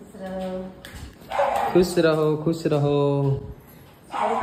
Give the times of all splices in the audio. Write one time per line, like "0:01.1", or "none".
none

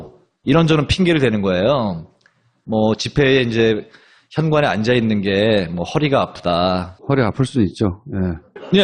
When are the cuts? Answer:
0:02.9

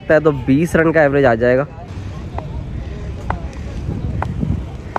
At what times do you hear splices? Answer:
0:01.9

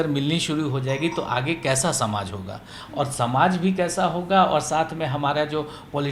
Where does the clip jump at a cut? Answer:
none

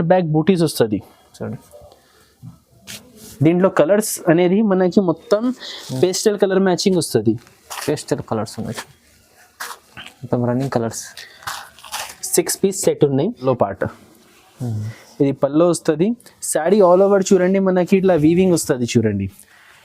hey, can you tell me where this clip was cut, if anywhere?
0:13.4

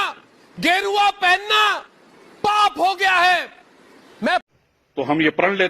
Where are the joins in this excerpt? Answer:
0:04.5

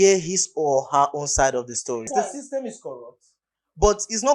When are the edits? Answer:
0:02.1

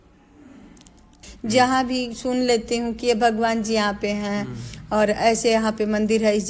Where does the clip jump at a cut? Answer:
0:01.2

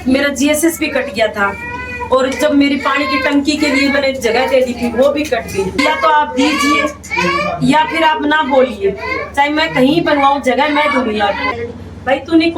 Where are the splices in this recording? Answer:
0:05.8
0:11.6

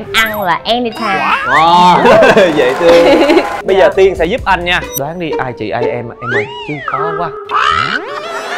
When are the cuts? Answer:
0:03.5

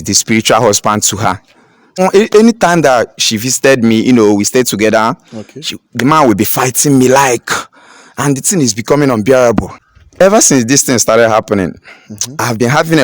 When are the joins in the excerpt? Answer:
0:02.0
0:09.8

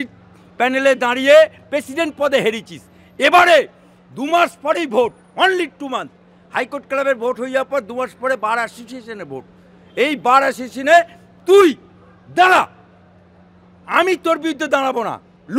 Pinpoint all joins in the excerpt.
none

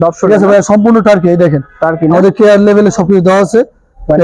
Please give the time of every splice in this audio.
none

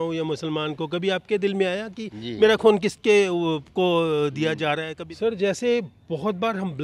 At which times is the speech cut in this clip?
0:04.9

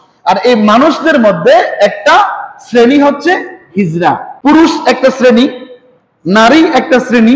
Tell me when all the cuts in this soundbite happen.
0:04.3

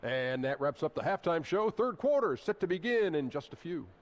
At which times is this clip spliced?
none

